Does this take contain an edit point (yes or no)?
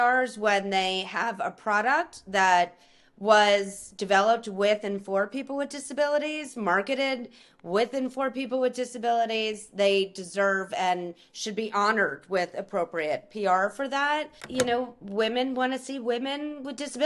yes